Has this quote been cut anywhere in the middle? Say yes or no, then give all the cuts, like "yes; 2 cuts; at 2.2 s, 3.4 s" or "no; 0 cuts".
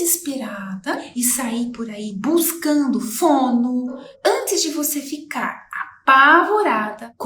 yes; 2 cuts; at 1.1 s, 4.0 s